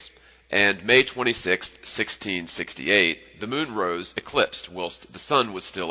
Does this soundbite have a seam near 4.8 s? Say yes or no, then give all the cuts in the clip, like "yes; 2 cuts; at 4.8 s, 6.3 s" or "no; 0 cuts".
yes; 1 cut; at 4.8 s